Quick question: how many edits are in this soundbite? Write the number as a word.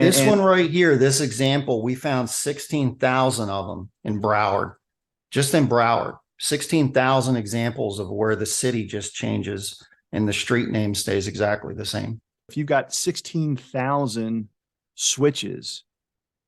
one